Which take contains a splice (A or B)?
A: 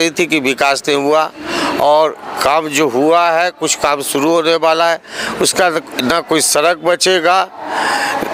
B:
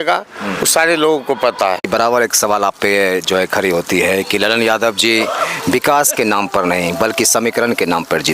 B